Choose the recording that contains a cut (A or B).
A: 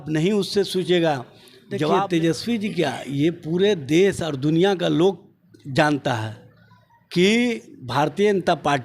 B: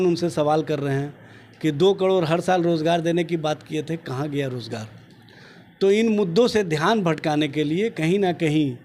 A